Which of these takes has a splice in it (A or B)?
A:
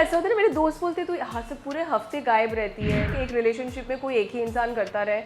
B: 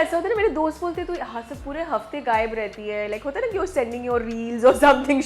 A